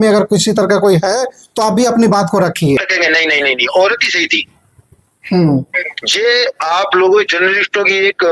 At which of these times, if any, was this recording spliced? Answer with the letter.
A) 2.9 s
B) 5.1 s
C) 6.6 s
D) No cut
A